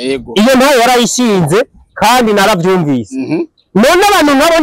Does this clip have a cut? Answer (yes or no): no